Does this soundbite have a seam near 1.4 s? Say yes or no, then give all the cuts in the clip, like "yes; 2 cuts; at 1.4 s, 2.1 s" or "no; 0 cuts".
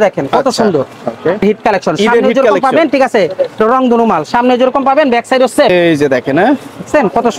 yes; 2 cuts; at 1.4 s, 5.7 s